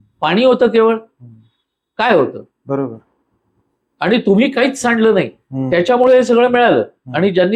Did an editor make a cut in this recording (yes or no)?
no